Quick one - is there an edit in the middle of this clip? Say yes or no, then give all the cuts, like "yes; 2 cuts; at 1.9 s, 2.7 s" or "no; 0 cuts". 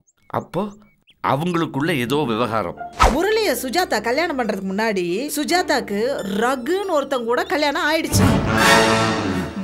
yes; 1 cut; at 3.0 s